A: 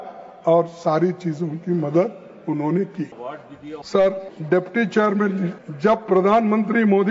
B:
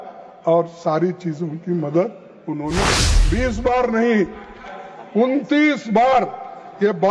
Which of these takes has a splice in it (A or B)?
B